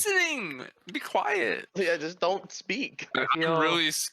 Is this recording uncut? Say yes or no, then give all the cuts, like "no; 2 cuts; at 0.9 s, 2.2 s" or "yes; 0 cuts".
no; 2 cuts; at 1.7 s, 3.1 s